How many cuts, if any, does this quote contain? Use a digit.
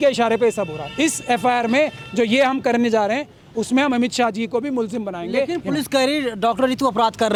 0